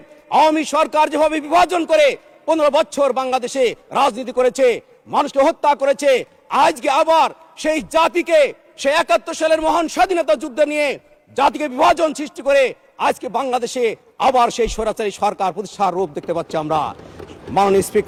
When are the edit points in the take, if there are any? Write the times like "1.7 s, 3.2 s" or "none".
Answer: none